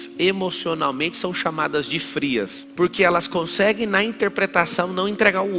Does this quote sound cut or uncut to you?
cut